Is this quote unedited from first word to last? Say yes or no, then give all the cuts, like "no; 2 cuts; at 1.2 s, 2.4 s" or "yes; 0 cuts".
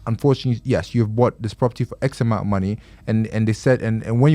yes; 0 cuts